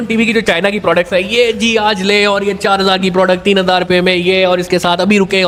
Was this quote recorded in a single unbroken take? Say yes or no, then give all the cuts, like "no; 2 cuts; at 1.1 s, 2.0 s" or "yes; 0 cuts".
yes; 0 cuts